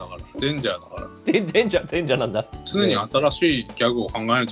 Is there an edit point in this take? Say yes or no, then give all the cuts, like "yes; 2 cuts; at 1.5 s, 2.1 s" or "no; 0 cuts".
yes; 1 cut; at 2.6 s